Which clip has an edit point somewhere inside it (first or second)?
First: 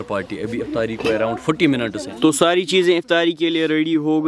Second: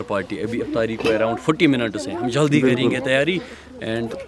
first